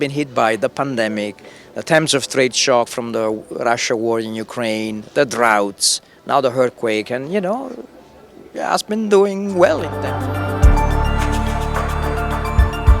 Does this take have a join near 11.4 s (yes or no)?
no